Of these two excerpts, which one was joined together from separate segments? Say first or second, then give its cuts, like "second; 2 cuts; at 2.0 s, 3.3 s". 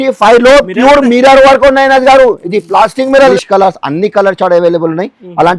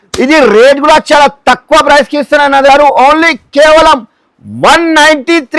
first; 1 cut; at 3.3 s